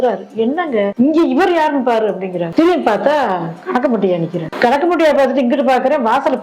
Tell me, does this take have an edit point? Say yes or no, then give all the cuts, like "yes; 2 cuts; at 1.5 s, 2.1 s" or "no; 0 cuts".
no; 0 cuts